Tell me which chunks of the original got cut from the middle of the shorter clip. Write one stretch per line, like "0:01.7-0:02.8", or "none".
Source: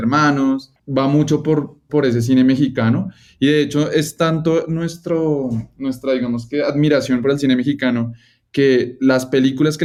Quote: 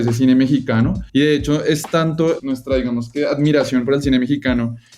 0:03.1-0:03.3
0:04.7-0:05.8